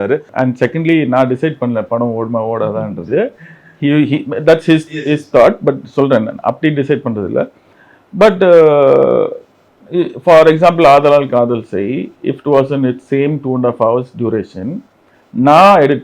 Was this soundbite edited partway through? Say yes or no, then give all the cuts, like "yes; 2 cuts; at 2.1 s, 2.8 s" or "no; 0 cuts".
no; 0 cuts